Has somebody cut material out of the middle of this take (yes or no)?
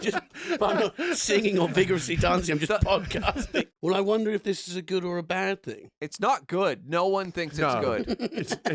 yes